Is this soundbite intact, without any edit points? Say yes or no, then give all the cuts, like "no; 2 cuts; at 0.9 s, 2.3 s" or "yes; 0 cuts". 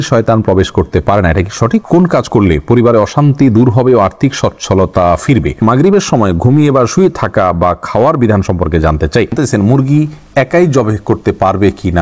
no; 3 cuts; at 1.9 s, 5.6 s, 9.3 s